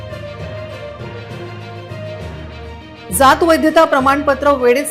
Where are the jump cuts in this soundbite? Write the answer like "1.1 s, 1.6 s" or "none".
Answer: 1.1 s